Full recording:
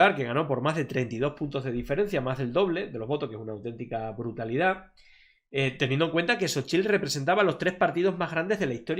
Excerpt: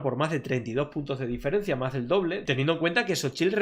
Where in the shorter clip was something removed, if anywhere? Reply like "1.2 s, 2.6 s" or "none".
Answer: 2.4 s